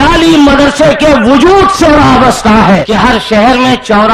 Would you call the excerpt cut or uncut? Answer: cut